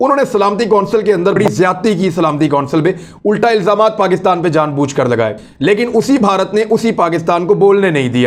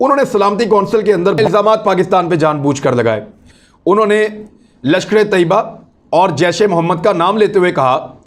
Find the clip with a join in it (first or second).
second